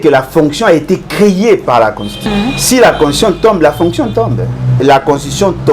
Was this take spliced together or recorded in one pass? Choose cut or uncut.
cut